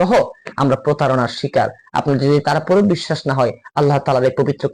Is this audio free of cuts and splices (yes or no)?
no